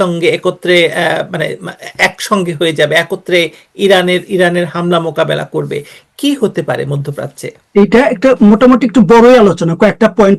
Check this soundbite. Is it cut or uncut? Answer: uncut